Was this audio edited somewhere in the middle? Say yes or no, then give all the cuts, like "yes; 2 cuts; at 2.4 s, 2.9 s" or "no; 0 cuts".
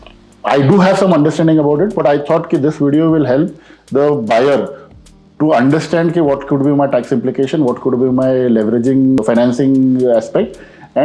no; 0 cuts